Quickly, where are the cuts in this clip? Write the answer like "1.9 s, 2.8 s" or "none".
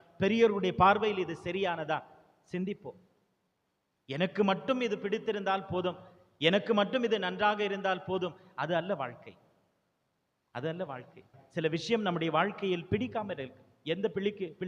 11.4 s